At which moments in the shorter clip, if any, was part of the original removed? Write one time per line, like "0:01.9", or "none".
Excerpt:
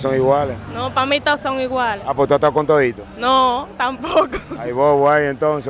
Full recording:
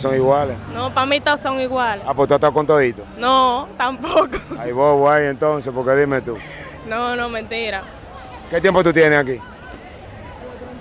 none